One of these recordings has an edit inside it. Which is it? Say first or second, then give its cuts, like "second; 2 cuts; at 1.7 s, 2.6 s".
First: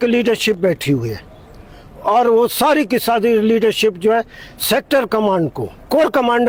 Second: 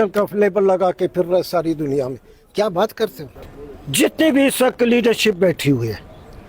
second; 1 cut; at 3.3 s